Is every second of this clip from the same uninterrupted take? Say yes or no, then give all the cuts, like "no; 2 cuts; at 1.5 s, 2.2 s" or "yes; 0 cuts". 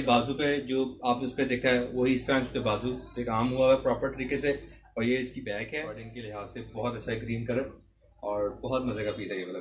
no; 1 cut; at 6.1 s